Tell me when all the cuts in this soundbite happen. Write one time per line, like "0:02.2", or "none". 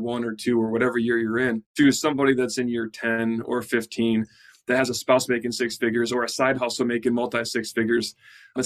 0:02.1

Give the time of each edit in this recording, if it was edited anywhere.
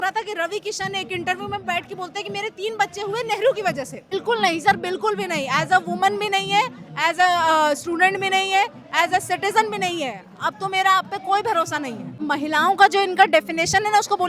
0:04.1
0:12.2

